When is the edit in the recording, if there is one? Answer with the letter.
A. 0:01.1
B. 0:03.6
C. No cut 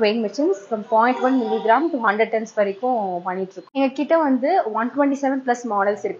B